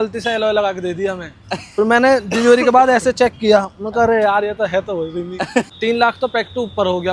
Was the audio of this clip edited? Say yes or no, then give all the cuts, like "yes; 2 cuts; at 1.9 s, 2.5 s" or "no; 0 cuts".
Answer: yes; 1 cut; at 5.7 s